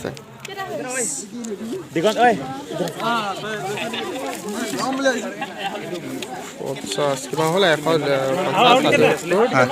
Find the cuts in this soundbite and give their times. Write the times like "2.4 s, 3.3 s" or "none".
0.9 s

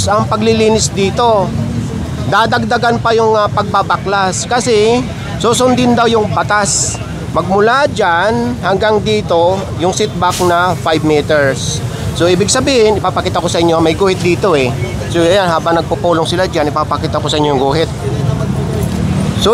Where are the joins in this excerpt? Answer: none

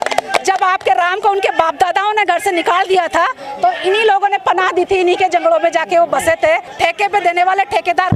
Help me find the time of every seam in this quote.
6.7 s

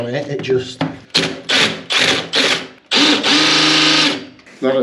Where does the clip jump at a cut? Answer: 1.0 s, 2.7 s

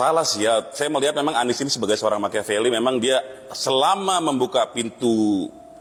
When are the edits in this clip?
none

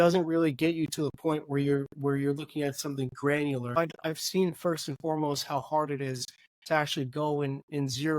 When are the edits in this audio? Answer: 3.8 s

